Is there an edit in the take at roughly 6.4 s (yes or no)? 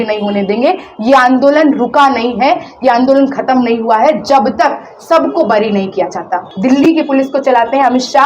yes